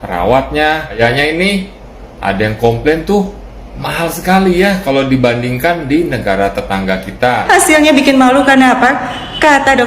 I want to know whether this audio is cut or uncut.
cut